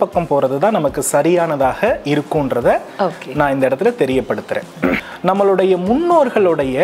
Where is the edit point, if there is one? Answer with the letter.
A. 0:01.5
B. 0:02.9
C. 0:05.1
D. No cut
C